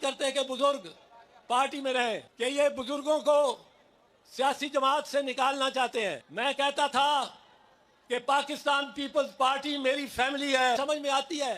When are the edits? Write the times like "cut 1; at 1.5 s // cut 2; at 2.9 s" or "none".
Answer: cut 1; at 2.3 s // cut 2; at 6.2 s // cut 3; at 10.8 s